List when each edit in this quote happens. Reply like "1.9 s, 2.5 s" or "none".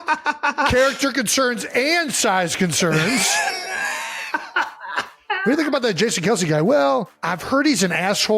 7.3 s